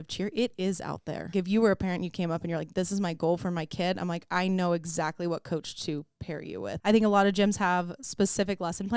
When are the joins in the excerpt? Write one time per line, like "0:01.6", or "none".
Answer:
0:01.3
0:06.8